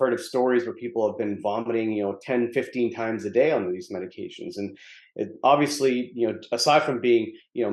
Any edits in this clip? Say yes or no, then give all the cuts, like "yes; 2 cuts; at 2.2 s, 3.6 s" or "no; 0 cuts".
no; 0 cuts